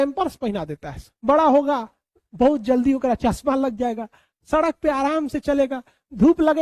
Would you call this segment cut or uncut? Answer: cut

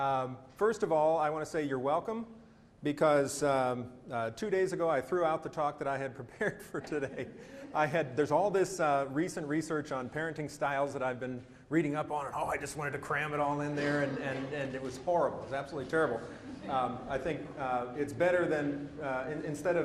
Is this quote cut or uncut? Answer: uncut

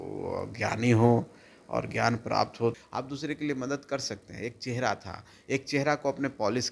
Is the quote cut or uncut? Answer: cut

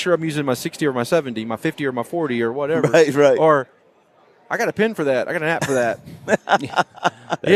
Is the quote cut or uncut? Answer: uncut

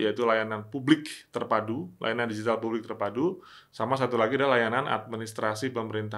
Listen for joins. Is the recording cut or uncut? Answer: uncut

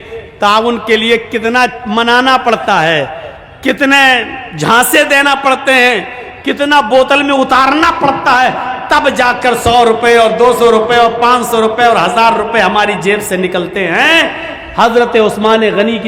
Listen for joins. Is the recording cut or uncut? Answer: uncut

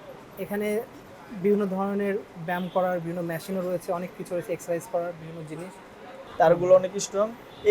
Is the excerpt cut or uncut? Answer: cut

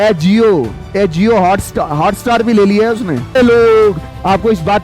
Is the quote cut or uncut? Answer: cut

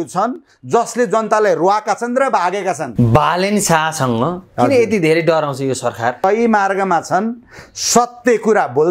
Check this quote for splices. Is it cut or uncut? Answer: cut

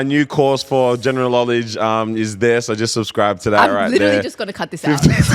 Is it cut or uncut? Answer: uncut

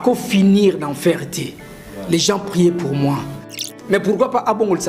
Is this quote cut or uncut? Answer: cut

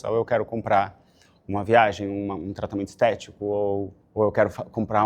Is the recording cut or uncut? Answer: cut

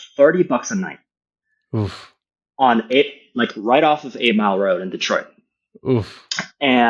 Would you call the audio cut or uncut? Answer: uncut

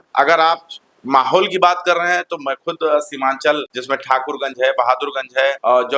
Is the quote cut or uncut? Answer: uncut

